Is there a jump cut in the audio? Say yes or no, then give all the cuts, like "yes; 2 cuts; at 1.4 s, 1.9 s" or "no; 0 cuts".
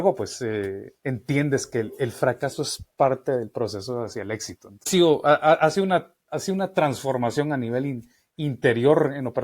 yes; 1 cut; at 4.9 s